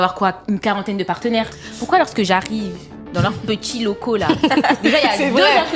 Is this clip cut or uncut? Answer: uncut